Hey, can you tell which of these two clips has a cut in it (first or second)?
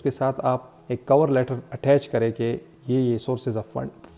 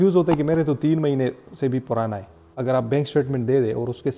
second